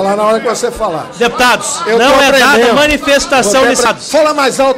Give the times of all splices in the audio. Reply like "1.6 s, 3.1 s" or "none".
3.8 s